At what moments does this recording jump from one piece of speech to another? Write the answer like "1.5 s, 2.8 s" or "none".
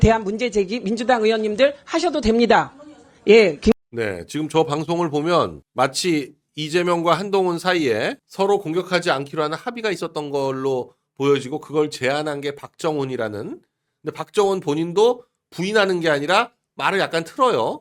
none